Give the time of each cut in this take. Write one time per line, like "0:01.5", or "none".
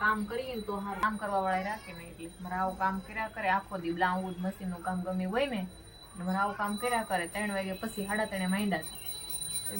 0:01.0